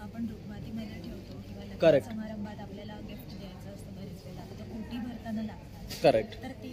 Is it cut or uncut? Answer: uncut